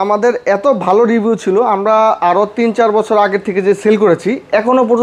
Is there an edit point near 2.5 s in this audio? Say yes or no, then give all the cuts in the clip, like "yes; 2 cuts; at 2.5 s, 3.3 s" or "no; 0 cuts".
no; 0 cuts